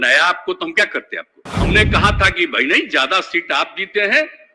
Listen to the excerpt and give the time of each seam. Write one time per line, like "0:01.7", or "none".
0:01.5